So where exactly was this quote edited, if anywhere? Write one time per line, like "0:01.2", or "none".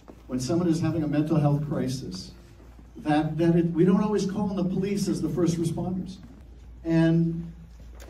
0:02.2
0:07.2